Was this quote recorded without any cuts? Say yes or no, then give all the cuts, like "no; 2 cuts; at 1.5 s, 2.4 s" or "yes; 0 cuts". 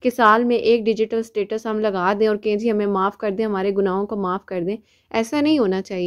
yes; 0 cuts